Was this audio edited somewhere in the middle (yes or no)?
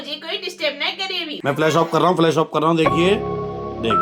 yes